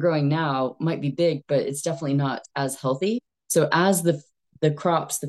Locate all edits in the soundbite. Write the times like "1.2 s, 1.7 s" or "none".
3.3 s